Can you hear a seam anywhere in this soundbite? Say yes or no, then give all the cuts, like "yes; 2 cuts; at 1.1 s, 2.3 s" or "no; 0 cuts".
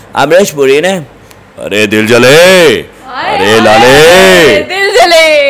no; 0 cuts